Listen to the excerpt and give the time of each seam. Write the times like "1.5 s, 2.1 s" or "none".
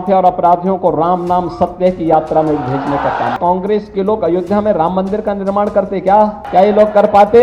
3.4 s, 6.4 s